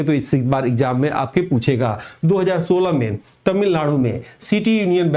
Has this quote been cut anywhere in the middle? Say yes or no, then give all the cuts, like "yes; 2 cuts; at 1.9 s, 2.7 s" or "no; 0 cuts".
no; 0 cuts